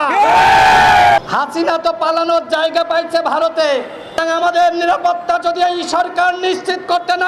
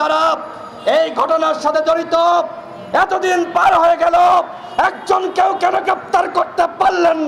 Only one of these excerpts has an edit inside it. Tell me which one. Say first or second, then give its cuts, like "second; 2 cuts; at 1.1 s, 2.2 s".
first; 2 cuts; at 1.2 s, 4.2 s